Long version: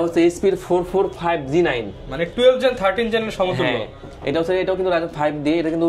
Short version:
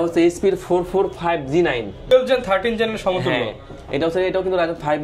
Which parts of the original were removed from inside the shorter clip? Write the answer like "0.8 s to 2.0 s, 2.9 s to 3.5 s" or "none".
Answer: 2.1 s to 2.4 s